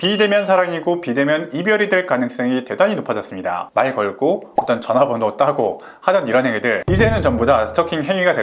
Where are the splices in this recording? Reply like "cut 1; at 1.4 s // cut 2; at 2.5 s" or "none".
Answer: cut 1; at 3.6 s